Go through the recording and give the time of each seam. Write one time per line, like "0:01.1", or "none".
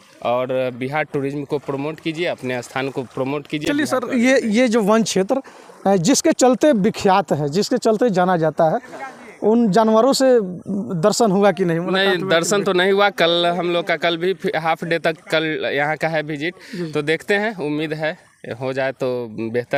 none